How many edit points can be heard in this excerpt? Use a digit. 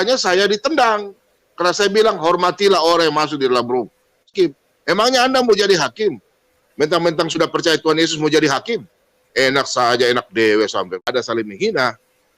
2